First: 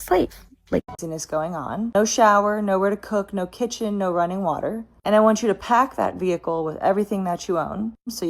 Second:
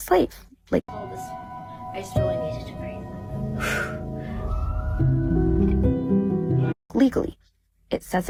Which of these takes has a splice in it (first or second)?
first